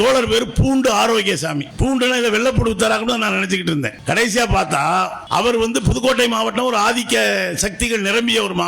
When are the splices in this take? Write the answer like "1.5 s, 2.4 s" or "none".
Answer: 1.7 s, 4.0 s, 5.2 s

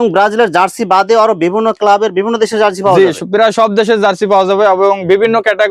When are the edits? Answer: none

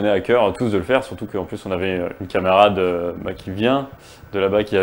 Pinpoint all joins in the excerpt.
none

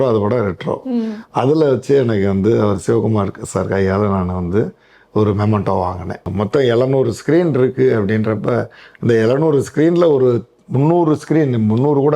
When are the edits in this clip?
6.3 s

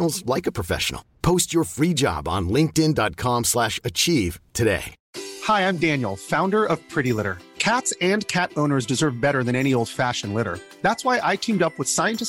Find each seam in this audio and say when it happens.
5.0 s

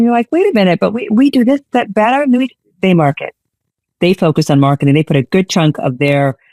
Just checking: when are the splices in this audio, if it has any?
none

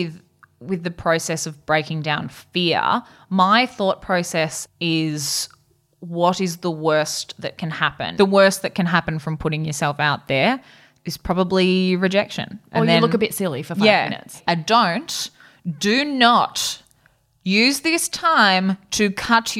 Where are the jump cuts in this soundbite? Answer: 4.6 s, 8.1 s, 14.3 s

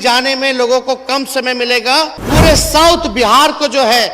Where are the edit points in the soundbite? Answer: 2.2 s

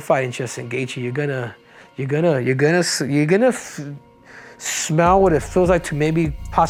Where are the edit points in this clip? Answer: none

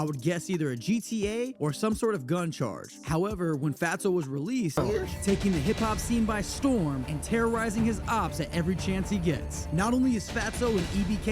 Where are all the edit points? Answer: 4.8 s

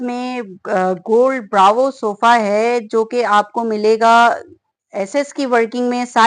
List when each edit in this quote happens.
none

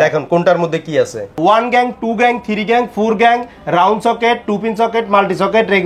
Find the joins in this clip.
1.4 s

